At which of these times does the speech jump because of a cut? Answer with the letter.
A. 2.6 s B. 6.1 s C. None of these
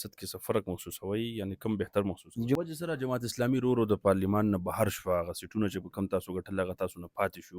A